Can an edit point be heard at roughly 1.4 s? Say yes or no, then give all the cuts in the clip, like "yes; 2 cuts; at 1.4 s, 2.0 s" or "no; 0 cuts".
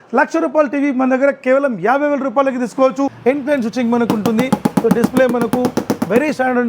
no; 1 cut; at 3.2 s